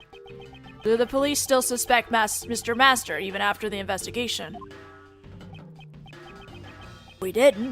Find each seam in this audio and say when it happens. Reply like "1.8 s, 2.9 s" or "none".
6.0 s